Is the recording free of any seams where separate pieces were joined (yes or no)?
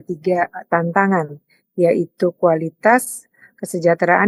yes